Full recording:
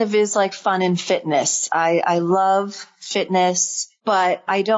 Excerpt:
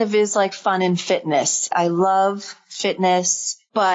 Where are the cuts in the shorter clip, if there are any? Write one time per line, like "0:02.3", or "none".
0:01.7